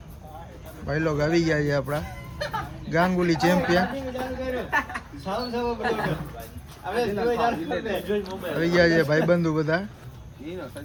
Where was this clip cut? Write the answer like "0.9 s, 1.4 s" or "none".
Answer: none